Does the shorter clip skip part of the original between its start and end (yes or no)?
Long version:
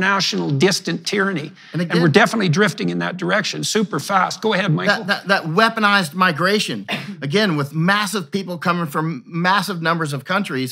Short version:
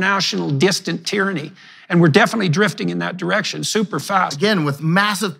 yes